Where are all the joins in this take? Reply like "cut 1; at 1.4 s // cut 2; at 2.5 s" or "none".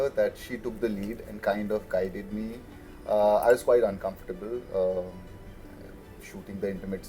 none